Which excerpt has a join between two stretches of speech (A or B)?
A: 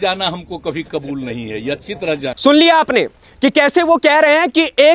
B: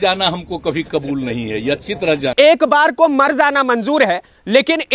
B